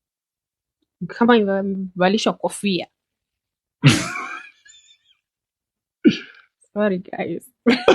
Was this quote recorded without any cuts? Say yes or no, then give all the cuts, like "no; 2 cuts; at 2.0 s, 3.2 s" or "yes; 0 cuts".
yes; 0 cuts